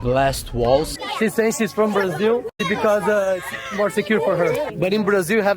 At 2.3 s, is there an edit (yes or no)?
no